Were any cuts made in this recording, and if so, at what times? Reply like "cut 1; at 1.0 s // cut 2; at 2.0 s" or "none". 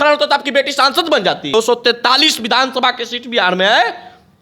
cut 1; at 1.5 s

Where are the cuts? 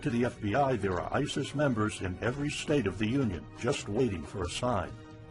cut 1; at 4.2 s

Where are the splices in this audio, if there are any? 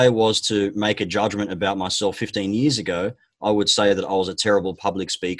none

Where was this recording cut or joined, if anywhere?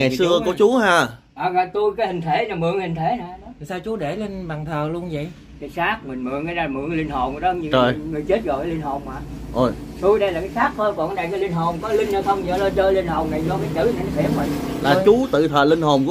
none

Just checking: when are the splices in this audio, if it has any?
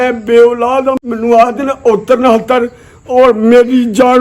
cut 1; at 1.0 s

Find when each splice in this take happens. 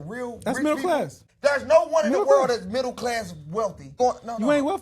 cut 1; at 1.2 s // cut 2; at 4.0 s

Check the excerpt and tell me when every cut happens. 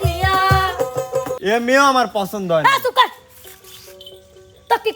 cut 1; at 1.4 s

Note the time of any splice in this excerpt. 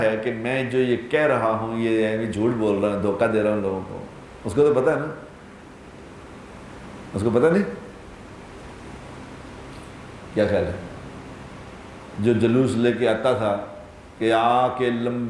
none

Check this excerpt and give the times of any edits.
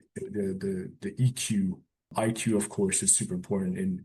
cut 1; at 2.1 s

